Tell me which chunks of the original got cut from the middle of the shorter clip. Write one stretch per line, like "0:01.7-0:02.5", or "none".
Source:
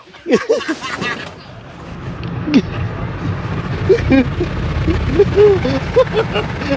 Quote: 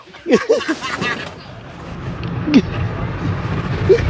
none

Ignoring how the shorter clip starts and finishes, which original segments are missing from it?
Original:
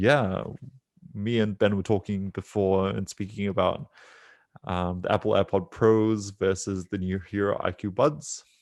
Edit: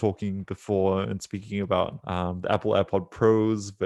0:03.9-0:04.6

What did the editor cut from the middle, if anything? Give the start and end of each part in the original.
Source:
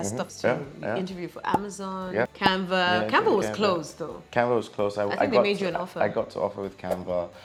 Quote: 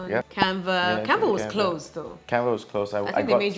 none

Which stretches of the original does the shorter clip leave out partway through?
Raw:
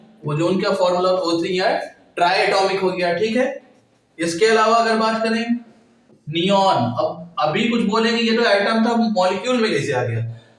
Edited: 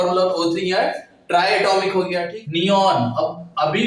0:03.1-0:06.1

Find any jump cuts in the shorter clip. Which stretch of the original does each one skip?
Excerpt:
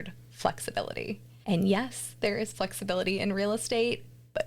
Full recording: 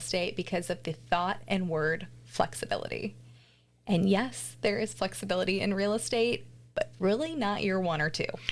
0:03.2-0:03.7

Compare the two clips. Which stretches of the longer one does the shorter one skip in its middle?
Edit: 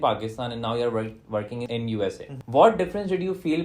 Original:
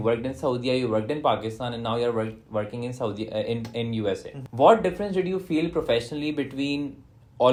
0:02.9-0:03.7

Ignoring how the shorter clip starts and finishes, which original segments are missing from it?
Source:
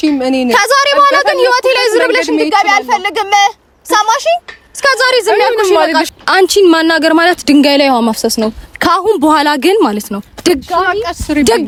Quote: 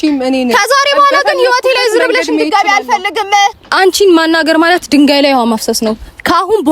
0:03.6-0:06.2

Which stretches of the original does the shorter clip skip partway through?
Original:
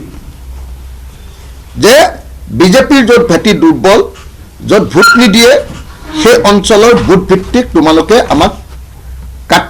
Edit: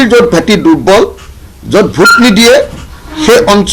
none

